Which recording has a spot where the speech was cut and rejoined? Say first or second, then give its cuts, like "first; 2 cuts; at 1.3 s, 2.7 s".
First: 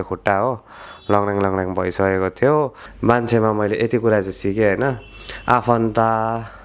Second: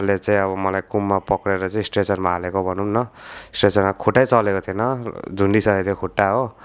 first; 1 cut; at 2.8 s